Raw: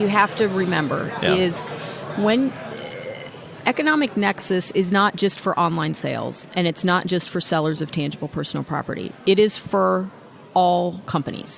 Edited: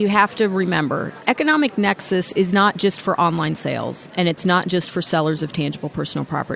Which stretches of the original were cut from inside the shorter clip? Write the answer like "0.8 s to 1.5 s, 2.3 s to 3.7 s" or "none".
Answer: 1.1 s to 3.5 s